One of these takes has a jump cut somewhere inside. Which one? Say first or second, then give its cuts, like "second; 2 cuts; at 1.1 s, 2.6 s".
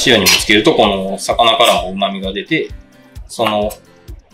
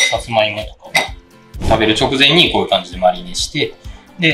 second; 1 cut; at 1.6 s